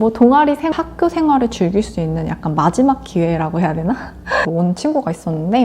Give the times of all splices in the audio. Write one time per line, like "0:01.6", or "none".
0:00.7
0:04.5